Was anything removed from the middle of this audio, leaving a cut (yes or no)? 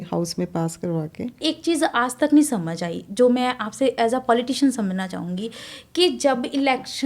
yes